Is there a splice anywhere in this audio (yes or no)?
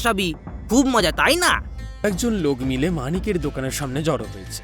yes